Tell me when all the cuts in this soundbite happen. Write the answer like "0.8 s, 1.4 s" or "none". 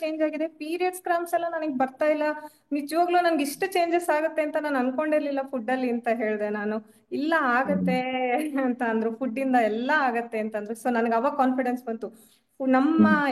none